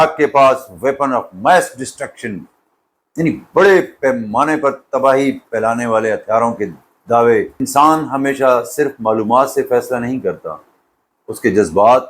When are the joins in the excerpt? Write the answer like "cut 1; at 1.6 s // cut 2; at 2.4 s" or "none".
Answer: cut 1; at 7.6 s